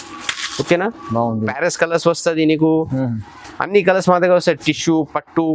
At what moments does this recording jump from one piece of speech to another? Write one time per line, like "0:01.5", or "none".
0:01.5